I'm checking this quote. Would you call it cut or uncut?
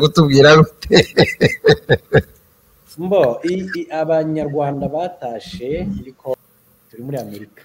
cut